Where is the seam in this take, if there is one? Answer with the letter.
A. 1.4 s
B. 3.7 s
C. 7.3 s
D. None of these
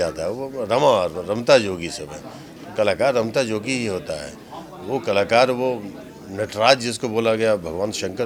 D